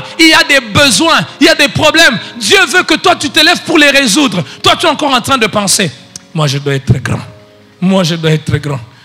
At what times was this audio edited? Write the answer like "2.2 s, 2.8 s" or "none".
none